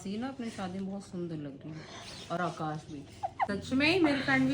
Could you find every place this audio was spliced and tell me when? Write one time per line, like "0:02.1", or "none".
0:03.5